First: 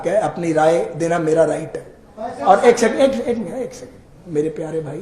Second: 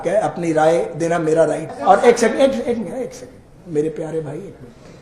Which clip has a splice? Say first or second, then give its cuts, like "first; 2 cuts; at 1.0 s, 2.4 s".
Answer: second; 1 cut; at 1.7 s